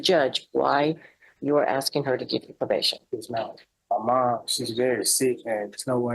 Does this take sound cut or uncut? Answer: cut